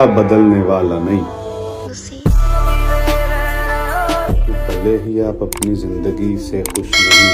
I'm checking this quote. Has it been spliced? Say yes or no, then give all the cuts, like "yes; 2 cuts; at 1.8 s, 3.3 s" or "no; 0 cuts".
yes; 1 cut; at 4.3 s